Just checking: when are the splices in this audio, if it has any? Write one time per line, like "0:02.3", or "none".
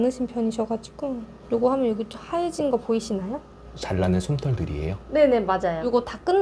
0:01.3
0:03.8